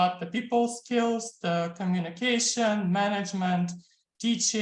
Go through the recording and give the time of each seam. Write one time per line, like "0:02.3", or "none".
none